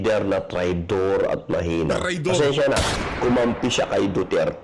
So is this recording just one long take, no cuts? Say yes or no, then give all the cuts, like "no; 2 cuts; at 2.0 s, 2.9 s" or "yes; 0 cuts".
no; 1 cut; at 3.3 s